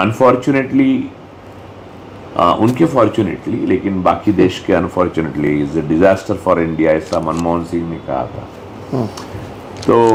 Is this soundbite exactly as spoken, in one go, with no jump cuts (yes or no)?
yes